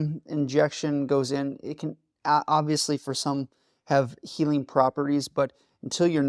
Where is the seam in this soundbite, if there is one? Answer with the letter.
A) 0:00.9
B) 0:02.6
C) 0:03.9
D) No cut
D